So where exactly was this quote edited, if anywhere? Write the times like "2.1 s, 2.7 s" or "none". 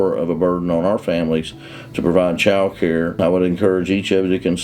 3.2 s